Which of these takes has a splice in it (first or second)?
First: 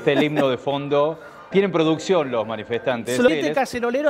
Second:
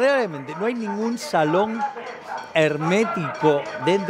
first